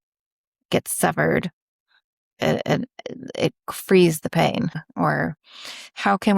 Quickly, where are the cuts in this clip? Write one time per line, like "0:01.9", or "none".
0:04.9